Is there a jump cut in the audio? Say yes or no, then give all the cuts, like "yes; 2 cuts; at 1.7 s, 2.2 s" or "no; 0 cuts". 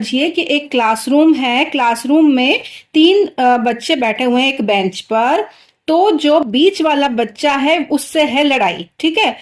no; 0 cuts